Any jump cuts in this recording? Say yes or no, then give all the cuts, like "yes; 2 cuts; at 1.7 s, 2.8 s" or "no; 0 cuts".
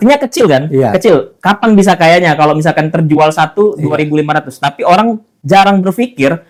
no; 0 cuts